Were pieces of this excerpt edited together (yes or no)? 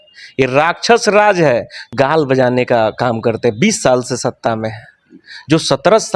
yes